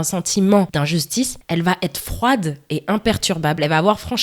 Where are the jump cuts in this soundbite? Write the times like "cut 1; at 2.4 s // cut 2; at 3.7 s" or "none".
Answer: cut 1; at 1.0 s

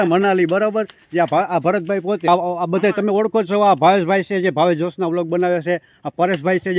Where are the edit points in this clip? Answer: cut 1; at 2.3 s

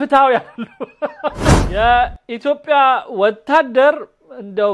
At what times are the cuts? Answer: cut 1; at 1.6 s

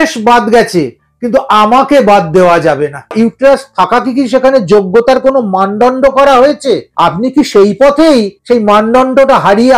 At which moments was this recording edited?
cut 1; at 3.1 s // cut 2; at 6.9 s // cut 3; at 8.3 s

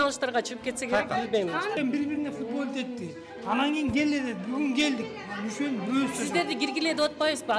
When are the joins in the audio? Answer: cut 1; at 1.8 s

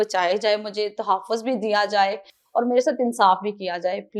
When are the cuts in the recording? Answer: none

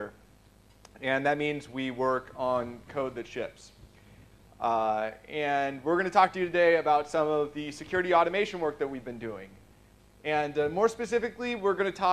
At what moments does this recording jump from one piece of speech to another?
none

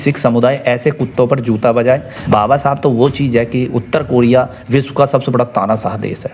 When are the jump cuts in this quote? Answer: cut 1; at 2.1 s

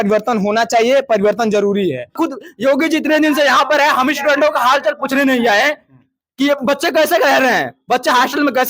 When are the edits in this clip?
cut 1; at 2.1 s

